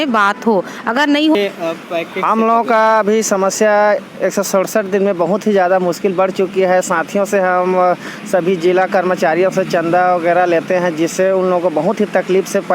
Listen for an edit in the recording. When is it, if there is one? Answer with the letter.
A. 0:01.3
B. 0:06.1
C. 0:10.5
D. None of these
A